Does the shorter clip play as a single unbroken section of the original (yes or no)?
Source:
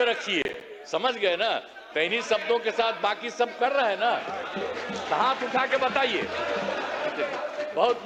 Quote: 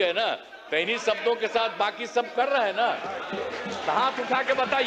yes